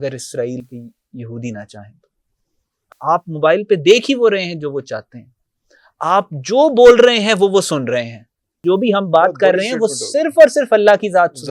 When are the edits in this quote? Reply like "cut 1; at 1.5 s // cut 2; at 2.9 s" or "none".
cut 1; at 8.6 s